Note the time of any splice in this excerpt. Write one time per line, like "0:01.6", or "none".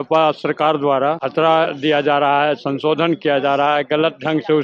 0:01.2